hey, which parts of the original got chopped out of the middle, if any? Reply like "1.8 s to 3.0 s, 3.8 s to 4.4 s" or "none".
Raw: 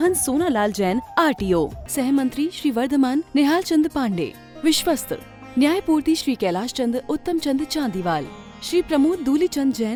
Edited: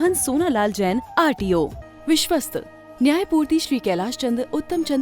1.8 s to 4.4 s